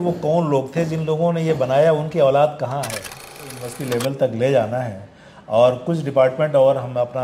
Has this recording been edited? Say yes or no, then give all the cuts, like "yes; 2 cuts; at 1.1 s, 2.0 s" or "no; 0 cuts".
yes; 1 cut; at 3.6 s